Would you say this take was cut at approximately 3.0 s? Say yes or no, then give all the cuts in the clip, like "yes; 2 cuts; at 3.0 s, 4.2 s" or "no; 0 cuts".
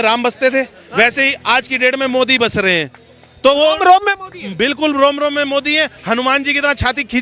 no; 0 cuts